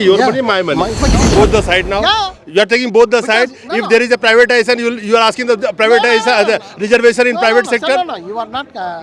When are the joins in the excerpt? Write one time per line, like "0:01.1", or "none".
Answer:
0:00.9